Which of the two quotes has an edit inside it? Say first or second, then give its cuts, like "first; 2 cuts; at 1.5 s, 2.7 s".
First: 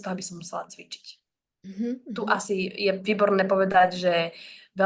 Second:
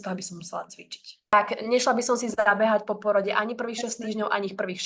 second; 1 cut; at 1.3 s